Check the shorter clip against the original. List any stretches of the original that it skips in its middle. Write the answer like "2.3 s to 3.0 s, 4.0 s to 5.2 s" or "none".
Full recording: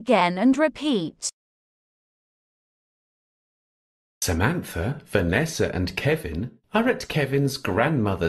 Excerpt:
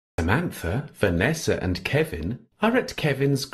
none